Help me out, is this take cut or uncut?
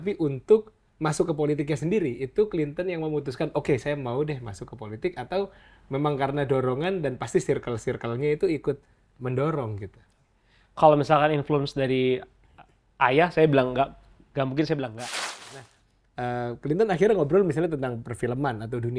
cut